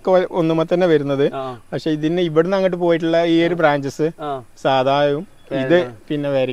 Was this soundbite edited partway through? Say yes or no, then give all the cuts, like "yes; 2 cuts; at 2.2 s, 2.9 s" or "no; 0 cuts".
no; 0 cuts